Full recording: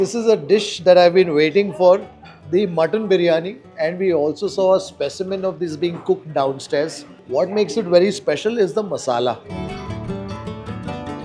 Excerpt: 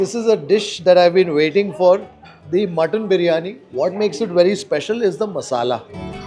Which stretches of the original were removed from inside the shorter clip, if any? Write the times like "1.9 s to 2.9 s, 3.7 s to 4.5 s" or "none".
3.6 s to 7.1 s

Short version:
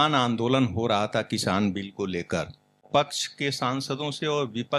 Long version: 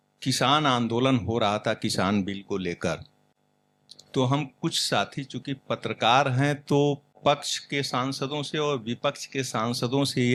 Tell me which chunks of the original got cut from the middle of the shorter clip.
3.3 s to 7.1 s

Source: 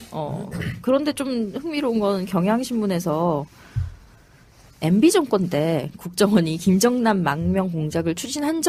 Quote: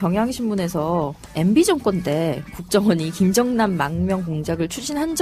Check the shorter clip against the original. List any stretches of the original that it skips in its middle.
3.5 s to 4.7 s

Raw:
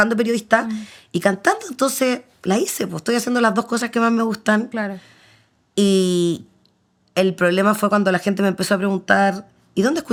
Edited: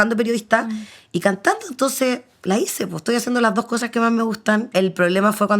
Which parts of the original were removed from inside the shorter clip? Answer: 4.7 s to 7.1 s

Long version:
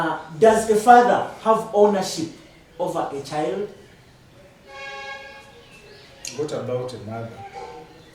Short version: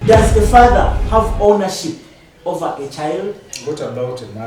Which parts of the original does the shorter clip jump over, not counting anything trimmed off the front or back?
3.8 s to 6.2 s

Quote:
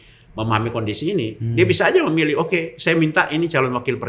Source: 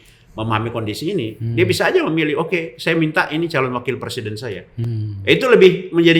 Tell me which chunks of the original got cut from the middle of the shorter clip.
none

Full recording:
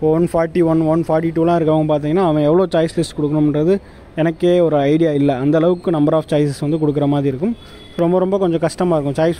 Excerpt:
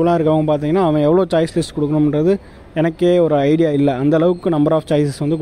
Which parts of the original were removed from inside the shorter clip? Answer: none

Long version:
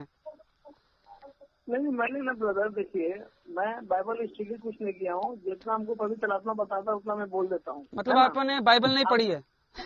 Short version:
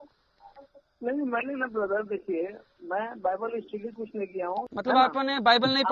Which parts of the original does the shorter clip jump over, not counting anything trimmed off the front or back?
5.4 s to 7.9 s

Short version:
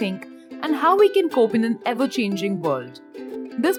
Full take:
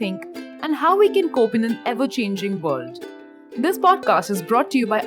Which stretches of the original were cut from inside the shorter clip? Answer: none

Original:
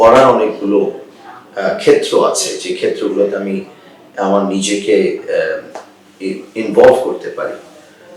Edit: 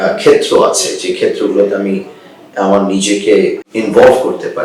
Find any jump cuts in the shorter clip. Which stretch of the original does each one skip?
5.2 s to 6.4 s

